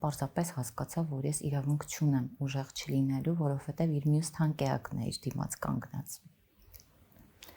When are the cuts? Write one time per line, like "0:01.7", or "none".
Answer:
none